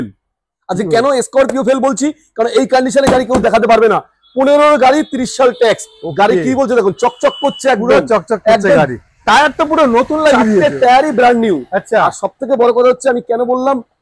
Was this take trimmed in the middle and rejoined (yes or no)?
no